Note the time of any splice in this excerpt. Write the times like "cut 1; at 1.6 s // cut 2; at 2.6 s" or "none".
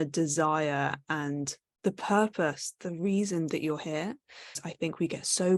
cut 1; at 1.6 s // cut 2; at 4.6 s